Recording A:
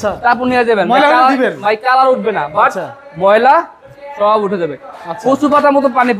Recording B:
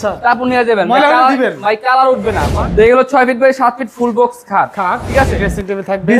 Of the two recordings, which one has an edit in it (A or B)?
B